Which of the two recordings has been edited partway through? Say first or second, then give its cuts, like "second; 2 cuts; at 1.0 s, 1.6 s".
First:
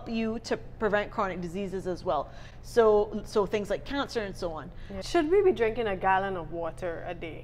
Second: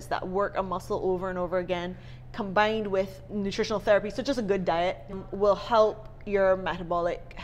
first; 1 cut; at 4.9 s